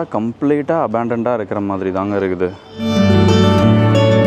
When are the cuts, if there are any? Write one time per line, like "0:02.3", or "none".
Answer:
none